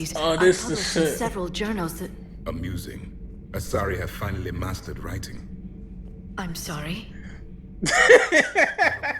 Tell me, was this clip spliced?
yes; 1 cut; at 5.6 s

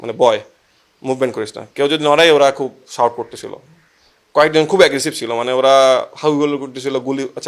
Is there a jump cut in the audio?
no; 0 cuts

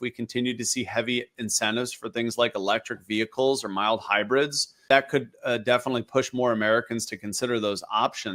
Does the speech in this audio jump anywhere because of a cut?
yes; 1 cut; at 4.9 s

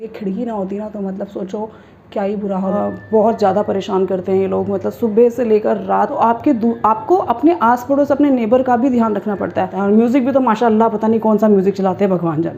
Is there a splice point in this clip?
yes; 3 cuts; at 2.7 s, 6.1 s, 9.7 s

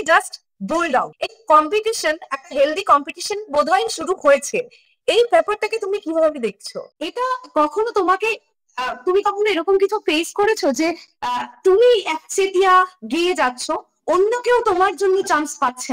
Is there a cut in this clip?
yes; 1 cut; at 6.8 s

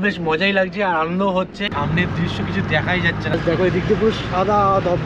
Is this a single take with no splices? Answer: no; 1 cut; at 1.7 s

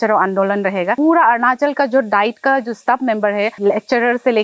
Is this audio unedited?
no; 2 cuts; at 1.0 s, 3.6 s

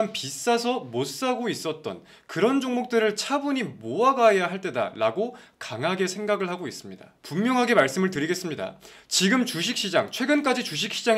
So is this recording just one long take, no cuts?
yes; 0 cuts

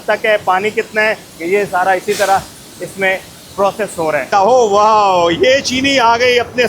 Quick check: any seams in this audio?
yes; 2 cuts; at 1.3 s, 4.3 s

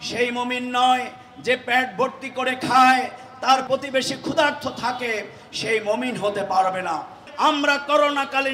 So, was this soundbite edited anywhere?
yes; 1 cut; at 7.2 s

